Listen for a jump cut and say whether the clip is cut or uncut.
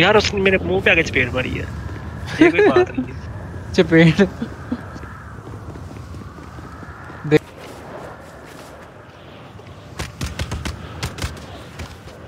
cut